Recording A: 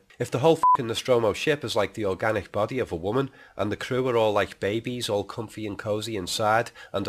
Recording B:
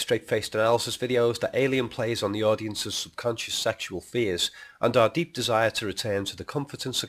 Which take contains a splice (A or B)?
B